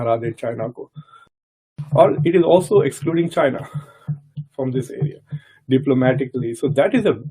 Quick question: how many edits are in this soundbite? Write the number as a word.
one